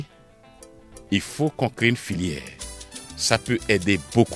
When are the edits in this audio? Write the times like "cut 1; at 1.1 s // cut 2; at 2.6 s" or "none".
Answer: none